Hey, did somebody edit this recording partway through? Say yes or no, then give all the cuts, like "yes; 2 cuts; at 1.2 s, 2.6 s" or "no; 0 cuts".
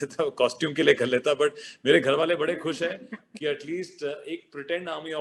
no; 0 cuts